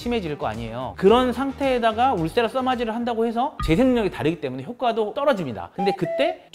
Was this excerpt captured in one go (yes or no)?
no